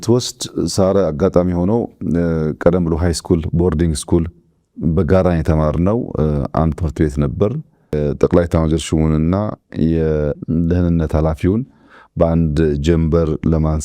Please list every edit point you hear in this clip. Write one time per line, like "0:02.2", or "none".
0:07.9